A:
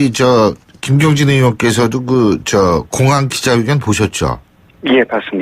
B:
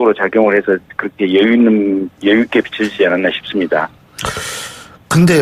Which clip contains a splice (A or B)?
A